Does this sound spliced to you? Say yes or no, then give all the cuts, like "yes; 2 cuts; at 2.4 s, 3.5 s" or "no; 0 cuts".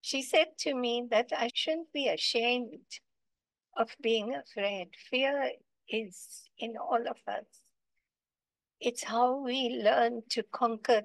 yes; 1 cut; at 1.6 s